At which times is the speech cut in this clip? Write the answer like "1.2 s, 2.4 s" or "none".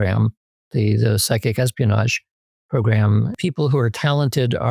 3.4 s